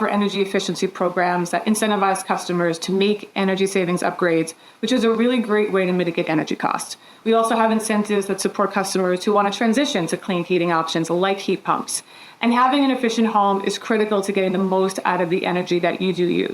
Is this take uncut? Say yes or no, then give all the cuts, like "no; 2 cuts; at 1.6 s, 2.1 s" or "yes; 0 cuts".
no; 1 cut; at 5.2 s